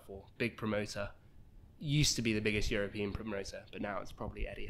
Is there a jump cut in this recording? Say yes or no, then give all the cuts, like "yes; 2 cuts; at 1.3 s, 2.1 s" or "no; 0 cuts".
no; 0 cuts